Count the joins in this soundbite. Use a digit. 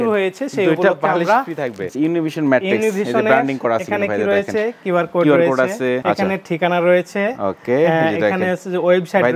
2